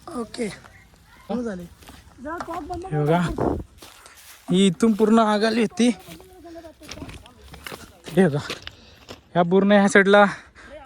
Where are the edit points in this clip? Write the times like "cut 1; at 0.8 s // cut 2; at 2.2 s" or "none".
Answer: cut 1; at 1.3 s